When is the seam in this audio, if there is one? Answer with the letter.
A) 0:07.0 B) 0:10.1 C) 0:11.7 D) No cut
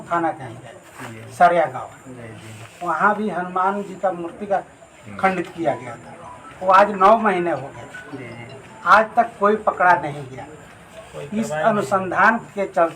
D